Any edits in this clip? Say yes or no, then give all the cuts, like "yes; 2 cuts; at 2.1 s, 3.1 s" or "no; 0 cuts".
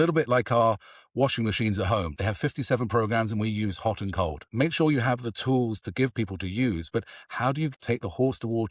yes; 3 cuts; at 2.1 s, 4.5 s, 7.7 s